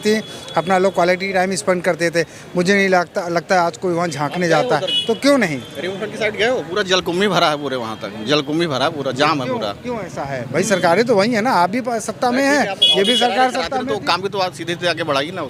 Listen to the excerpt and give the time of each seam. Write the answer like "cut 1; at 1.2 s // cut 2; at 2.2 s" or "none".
none